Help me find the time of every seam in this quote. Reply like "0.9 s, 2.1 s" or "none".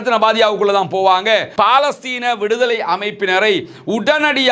1.5 s